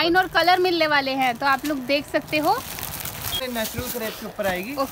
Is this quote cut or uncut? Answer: cut